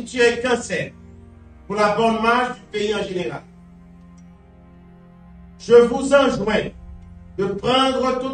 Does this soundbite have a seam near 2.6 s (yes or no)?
no